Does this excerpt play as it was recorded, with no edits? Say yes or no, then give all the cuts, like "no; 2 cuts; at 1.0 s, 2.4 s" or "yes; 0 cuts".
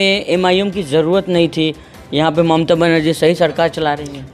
yes; 0 cuts